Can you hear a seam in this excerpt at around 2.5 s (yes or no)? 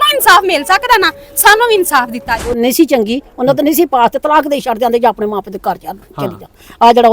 yes